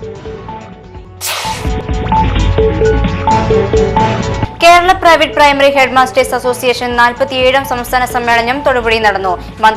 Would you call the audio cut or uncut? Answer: cut